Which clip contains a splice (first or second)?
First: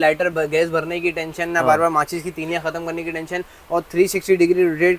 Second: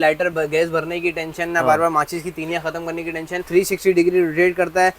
second